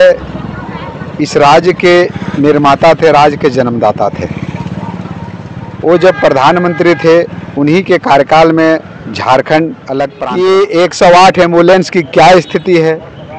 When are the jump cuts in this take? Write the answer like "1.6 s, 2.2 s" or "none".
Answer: 10.2 s